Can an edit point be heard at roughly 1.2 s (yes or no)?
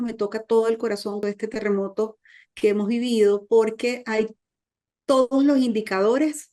yes